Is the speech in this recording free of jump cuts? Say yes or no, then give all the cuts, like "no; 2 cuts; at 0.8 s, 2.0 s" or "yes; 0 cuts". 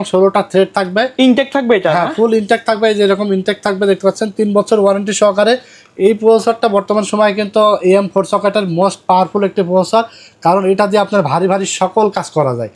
yes; 0 cuts